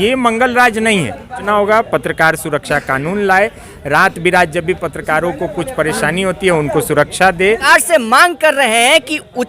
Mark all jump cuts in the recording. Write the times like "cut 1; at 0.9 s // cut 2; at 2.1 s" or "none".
cut 1; at 1.4 s // cut 2; at 7.6 s